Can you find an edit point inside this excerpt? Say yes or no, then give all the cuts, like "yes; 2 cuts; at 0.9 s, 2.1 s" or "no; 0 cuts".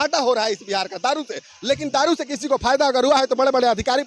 no; 0 cuts